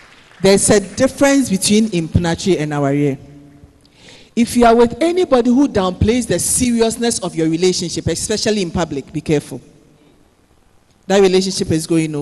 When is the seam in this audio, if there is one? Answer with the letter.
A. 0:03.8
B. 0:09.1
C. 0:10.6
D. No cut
D